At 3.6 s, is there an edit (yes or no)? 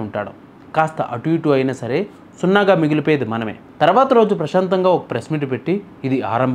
yes